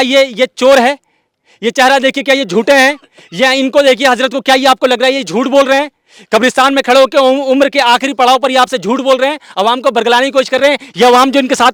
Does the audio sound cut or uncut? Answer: uncut